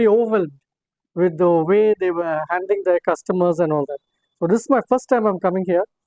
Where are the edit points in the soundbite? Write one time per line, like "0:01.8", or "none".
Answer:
none